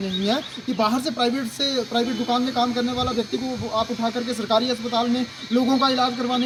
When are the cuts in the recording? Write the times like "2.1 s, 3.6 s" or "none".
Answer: none